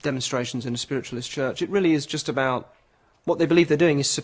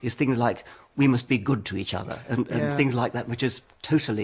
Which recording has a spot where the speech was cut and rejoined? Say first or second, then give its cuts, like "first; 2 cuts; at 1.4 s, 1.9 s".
second; 1 cut; at 1.4 s